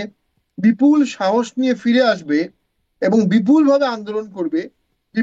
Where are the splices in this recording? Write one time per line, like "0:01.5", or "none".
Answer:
none